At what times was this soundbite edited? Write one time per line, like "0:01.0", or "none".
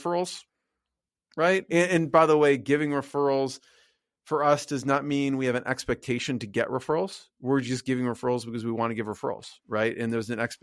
none